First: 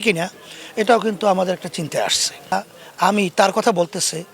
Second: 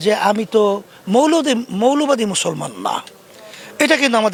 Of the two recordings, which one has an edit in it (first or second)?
first